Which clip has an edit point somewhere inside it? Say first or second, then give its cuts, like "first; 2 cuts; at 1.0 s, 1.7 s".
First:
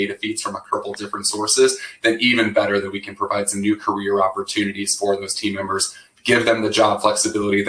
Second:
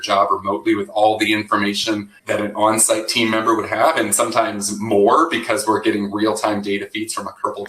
second; 1 cut; at 2.1 s